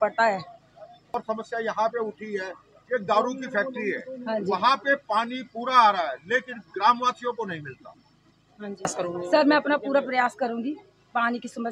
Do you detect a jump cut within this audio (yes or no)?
yes